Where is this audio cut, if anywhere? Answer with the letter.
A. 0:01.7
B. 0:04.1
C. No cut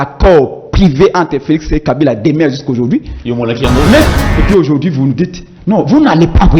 B